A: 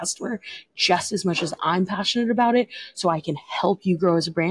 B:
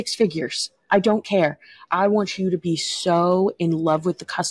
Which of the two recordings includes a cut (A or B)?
B